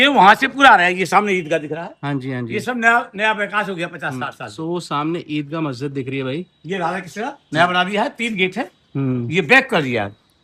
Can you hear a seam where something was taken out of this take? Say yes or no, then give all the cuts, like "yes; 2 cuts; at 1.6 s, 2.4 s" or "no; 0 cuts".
no; 0 cuts